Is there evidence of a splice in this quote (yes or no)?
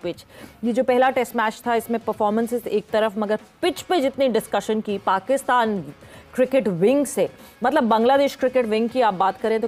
no